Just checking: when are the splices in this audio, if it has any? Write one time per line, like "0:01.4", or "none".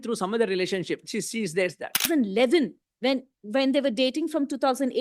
0:02.1